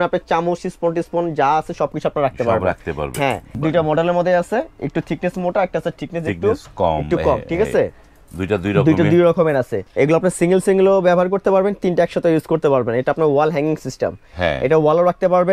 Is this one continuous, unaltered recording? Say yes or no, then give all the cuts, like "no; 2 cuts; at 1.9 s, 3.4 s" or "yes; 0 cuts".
no; 2 cuts; at 3.5 s, 9.8 s